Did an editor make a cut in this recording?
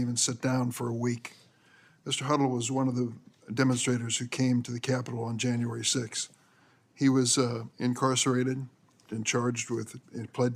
yes; 1 cut; at 8.9 s

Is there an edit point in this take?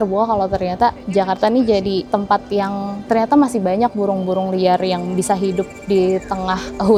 no; 0 cuts

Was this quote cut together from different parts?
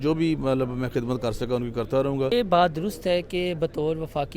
yes; 1 cut; at 2.3 s

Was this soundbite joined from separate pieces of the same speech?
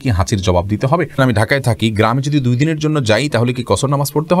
yes; 1 cut; at 1.1 s

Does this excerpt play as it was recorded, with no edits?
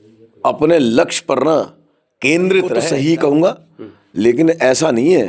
no; 1 cut; at 2.8 s

